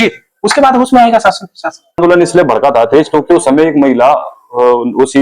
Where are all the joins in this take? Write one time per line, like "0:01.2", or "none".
0:02.0